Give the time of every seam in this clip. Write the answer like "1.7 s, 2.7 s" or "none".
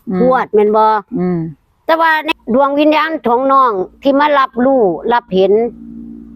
2.3 s